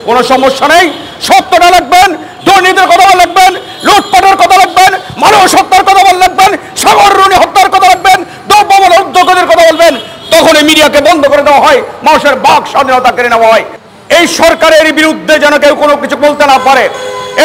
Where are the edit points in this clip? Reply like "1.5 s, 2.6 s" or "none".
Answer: 13.8 s